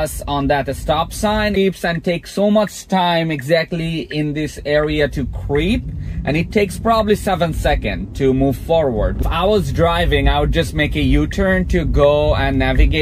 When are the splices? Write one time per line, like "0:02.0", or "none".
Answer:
0:01.6
0:09.2